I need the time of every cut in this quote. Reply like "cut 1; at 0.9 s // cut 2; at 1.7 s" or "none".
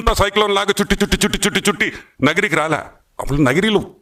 none